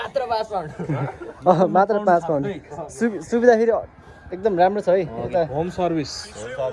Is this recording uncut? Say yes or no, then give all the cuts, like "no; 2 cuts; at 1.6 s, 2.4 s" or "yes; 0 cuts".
yes; 0 cuts